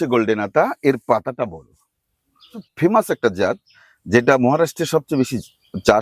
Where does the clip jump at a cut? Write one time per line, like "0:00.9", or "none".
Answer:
0:02.6